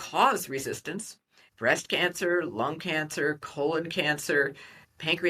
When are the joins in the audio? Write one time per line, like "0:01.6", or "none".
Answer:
0:01.5